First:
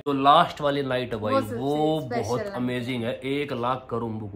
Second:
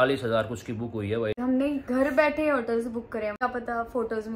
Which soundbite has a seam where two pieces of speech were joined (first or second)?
second